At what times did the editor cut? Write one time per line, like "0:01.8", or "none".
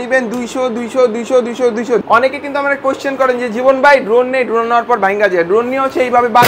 0:02.0